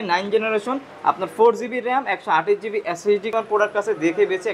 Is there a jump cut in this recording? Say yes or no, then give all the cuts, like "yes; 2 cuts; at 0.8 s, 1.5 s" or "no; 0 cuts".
yes; 1 cut; at 3.3 s